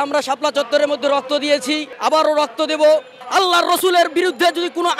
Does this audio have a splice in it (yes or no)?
yes